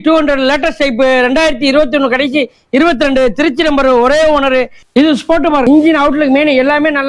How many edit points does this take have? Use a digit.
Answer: 2